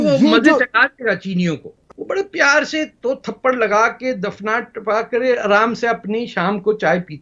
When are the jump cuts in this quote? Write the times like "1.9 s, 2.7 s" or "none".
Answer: 1.8 s